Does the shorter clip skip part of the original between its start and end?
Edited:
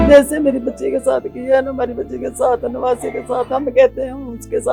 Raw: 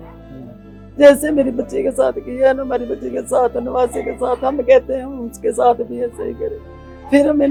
no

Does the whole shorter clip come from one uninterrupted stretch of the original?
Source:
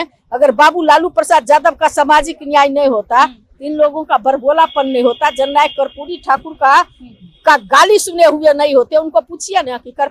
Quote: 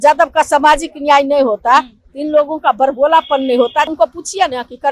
no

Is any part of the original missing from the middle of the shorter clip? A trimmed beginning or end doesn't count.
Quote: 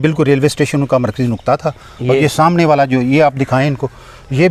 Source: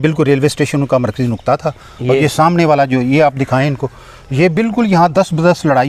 no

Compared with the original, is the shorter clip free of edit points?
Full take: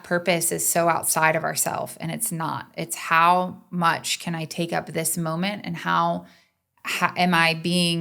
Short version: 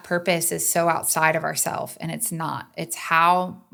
yes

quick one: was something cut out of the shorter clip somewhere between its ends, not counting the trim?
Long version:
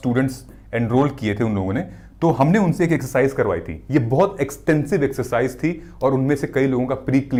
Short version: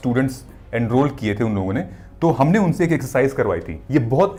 no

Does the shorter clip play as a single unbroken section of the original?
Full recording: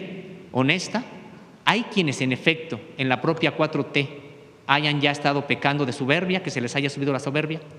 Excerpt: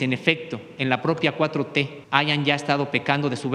no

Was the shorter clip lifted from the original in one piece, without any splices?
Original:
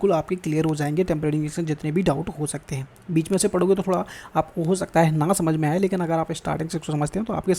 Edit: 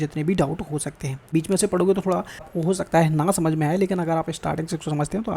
no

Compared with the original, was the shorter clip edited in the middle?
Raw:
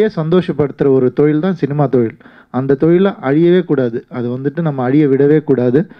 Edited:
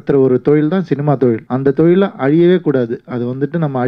yes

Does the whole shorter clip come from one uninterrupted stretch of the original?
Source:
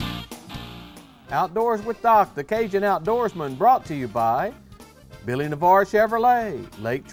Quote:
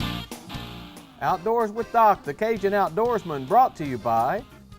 no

